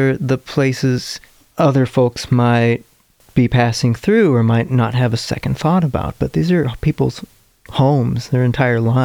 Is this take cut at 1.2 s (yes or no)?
no